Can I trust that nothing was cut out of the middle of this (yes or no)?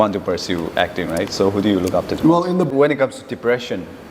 no